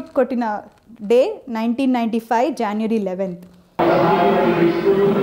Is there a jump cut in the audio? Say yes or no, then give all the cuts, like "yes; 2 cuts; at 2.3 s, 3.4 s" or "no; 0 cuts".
no; 0 cuts